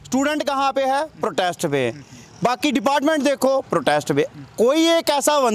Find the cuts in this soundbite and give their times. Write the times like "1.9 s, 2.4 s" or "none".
none